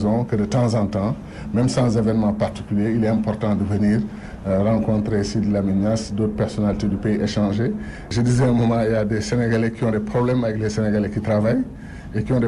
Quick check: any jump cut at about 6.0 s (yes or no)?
no